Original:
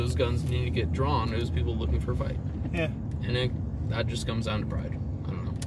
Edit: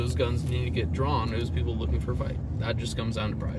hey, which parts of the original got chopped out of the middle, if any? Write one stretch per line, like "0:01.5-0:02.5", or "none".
0:02.4-0:03.7